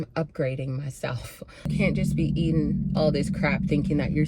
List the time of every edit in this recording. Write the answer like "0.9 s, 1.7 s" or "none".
1.7 s